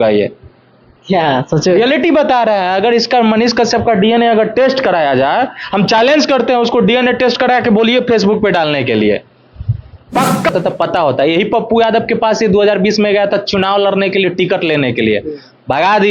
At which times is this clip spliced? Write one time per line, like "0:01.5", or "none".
0:10.5